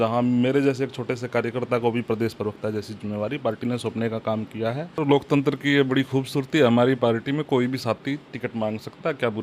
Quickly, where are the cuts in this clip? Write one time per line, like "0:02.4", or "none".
0:05.0